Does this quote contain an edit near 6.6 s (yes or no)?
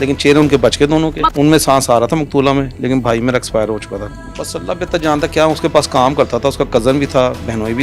no